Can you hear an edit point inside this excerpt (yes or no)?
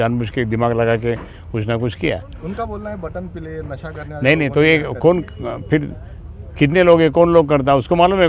no